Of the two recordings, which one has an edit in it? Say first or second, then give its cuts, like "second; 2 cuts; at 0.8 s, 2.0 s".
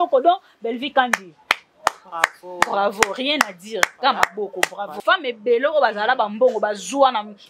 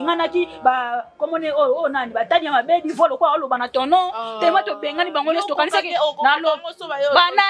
first; 1 cut; at 5.0 s